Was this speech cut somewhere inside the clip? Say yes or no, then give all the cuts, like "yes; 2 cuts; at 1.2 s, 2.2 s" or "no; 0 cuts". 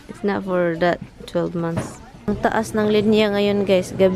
yes; 1 cut; at 2.0 s